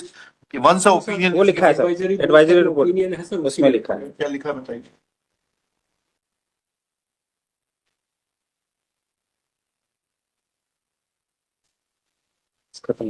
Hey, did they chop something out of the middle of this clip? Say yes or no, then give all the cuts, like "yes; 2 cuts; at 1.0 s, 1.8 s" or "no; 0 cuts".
no; 0 cuts